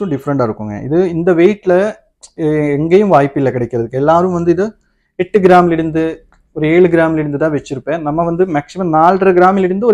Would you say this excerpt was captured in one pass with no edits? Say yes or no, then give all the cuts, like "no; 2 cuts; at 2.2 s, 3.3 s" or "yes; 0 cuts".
yes; 0 cuts